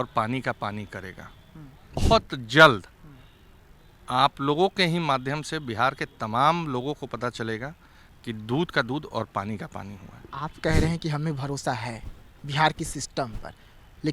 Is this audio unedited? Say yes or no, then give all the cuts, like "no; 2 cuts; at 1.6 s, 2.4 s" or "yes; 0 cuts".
no; 1 cut; at 2.0 s